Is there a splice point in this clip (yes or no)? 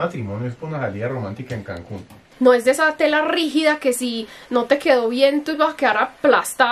yes